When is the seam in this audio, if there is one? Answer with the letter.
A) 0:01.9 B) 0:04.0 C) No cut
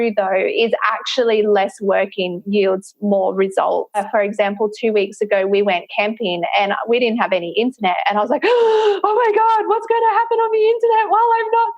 B